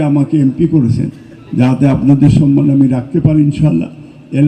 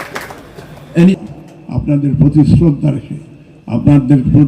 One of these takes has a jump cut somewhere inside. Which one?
second; 1 cut; at 1.2 s

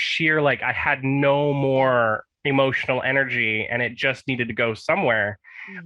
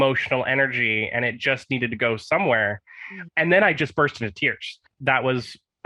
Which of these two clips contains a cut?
second; 1 cut; at 4.9 s

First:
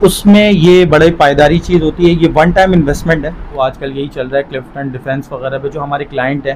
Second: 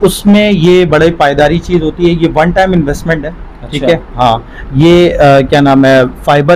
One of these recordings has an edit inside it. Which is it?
first; 1 cut; at 3.5 s

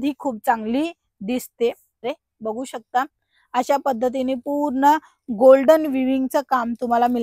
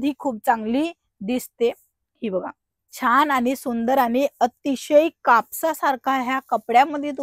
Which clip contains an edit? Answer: first; 1 cut; at 2.0 s

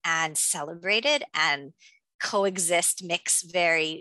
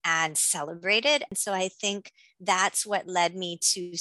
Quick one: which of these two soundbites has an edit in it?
second; 1 cut; at 1.3 s

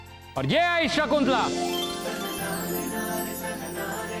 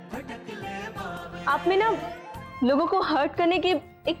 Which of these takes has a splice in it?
first; 1 cut; at 1.5 s

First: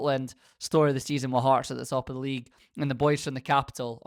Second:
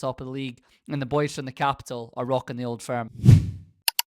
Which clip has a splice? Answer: second; 1 cut; at 3.1 s

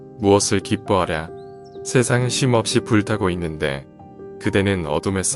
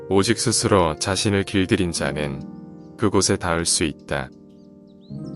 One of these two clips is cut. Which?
second; 1 cut; at 4.3 s

